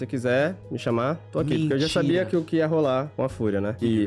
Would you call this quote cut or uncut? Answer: uncut